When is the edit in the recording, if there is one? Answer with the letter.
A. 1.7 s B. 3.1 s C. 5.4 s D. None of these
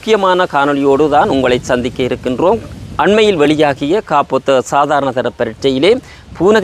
D